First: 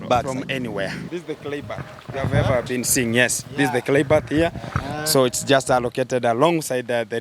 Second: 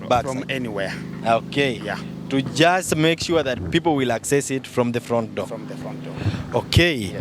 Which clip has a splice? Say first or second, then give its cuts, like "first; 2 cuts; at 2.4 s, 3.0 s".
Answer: first; 1 cut; at 1.0 s